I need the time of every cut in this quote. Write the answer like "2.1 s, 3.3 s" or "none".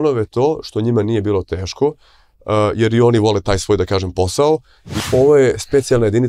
5.0 s